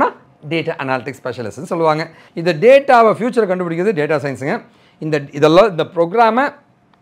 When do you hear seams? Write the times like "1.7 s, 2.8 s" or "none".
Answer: 2.2 s